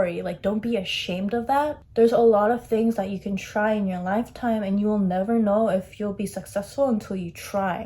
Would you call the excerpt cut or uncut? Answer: cut